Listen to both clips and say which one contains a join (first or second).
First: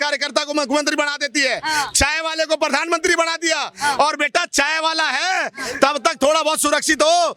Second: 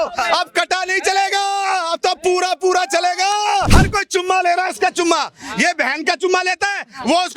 second